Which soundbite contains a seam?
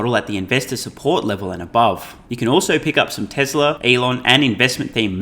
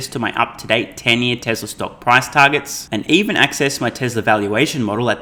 first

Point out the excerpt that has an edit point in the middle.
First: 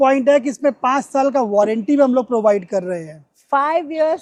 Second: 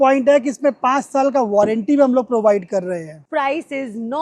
second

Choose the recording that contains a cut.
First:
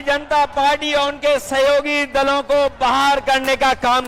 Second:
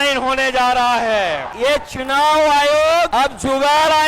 second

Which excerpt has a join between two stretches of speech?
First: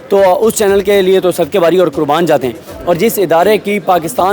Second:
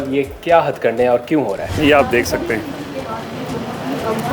second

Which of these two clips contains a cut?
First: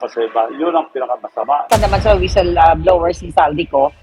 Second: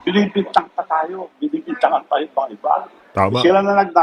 first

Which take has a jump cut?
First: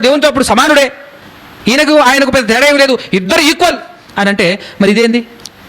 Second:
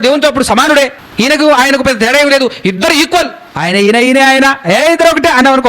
second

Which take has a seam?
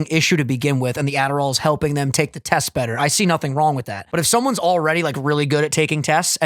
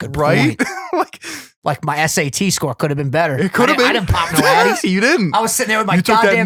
first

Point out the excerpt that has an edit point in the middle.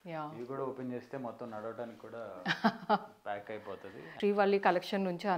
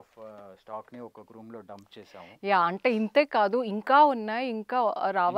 first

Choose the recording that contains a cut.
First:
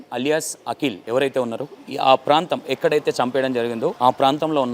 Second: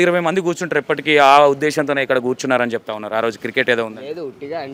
first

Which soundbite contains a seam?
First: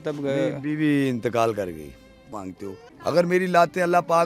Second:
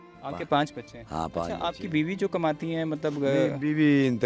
first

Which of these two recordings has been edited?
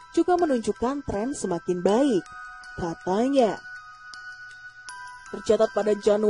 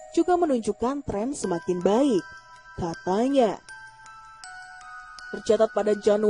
first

